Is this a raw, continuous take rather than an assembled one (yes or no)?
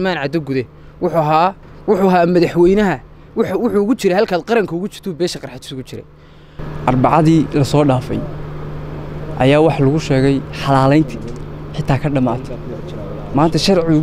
no